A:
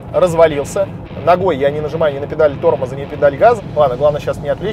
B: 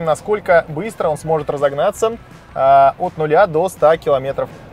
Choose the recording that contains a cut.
A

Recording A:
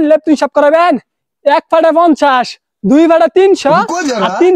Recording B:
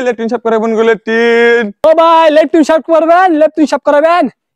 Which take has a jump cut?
B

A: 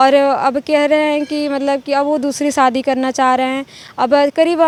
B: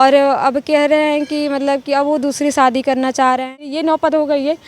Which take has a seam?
B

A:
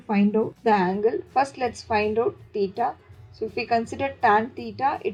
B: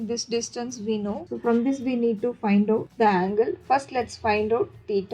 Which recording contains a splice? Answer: B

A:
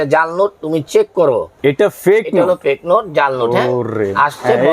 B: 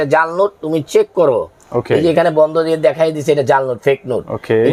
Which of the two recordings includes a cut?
A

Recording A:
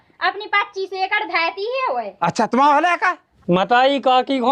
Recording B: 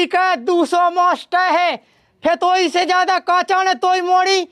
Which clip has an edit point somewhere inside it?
A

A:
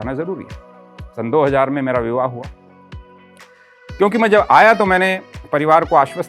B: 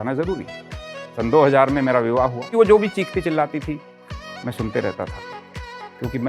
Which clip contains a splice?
B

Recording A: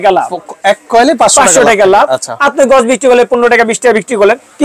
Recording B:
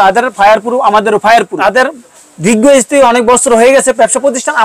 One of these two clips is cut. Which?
B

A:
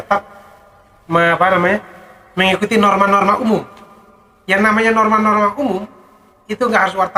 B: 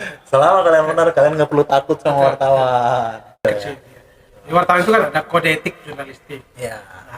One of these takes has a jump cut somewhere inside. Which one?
B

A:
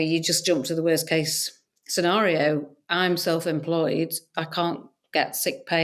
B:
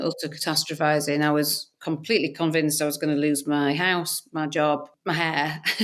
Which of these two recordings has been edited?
B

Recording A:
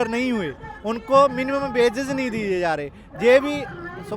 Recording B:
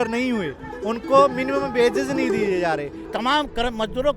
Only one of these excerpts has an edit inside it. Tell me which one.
B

